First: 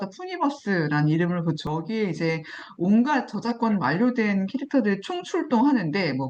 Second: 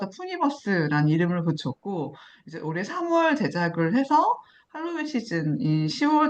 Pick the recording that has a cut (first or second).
first